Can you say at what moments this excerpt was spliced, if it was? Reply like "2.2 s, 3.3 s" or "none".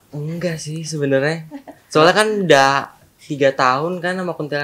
none